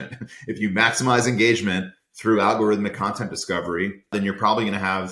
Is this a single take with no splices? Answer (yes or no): no